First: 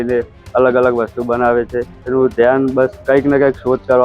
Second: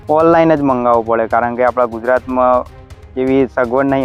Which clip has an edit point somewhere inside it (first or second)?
first